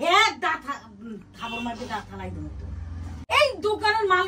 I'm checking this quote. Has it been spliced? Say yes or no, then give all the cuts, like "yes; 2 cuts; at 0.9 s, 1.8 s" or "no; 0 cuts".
yes; 1 cut; at 3.1 s